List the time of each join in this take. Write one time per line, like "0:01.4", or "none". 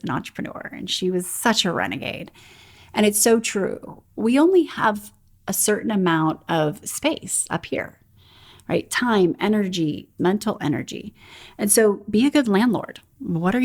0:10.1